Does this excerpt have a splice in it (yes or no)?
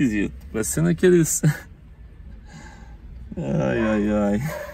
no